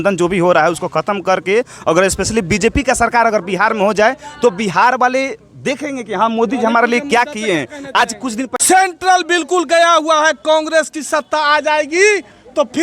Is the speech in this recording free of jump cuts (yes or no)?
no